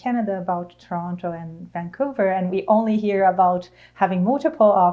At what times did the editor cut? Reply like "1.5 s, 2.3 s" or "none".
none